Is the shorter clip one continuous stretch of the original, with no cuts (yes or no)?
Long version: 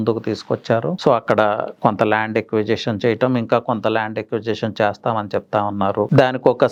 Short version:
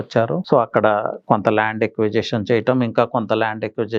yes